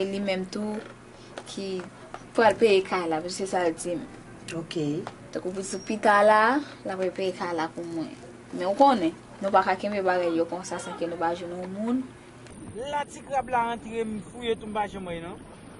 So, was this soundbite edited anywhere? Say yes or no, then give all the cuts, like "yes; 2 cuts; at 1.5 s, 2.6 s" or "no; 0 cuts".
yes; 1 cut; at 5.5 s